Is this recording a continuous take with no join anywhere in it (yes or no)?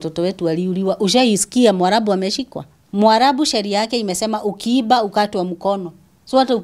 no